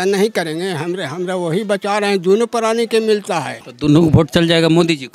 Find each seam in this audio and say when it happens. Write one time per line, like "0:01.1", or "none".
0:03.6